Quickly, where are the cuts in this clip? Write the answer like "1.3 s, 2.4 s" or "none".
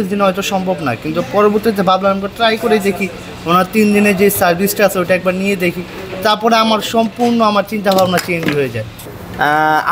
8.9 s